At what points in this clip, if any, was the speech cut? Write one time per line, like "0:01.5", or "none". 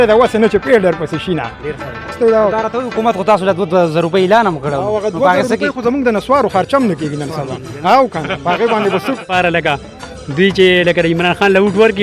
0:02.1
0:09.3